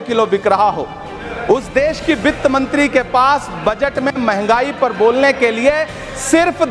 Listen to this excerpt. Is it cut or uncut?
uncut